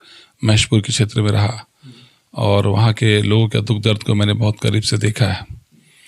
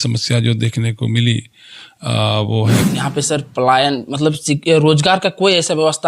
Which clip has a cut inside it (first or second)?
second